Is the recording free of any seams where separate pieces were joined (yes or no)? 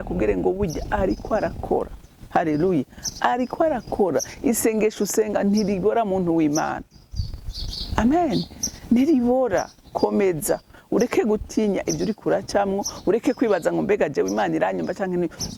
yes